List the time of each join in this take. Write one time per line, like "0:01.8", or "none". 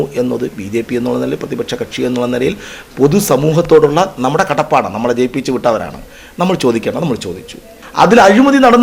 0:07.8